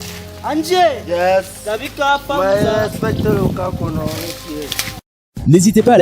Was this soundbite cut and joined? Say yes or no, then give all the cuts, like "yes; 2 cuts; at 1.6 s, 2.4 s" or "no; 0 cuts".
yes; 1 cut; at 5.0 s